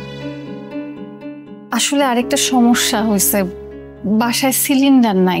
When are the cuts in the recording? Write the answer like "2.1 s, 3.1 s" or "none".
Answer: none